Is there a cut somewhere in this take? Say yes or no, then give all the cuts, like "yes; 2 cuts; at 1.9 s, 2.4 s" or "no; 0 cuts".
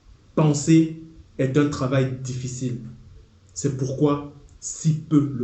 no; 0 cuts